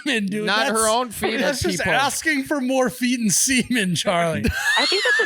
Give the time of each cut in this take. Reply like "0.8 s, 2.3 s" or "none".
1.4 s, 4.4 s